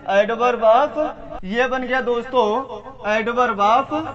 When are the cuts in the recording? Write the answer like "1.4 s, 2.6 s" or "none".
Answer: 1.3 s